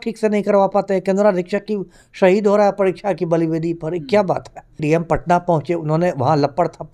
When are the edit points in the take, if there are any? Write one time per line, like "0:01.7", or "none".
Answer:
0:04.8